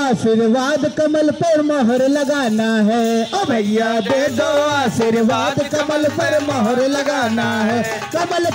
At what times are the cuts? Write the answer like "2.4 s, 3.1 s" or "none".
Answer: none